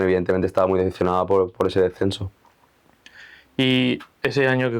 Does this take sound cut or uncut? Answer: uncut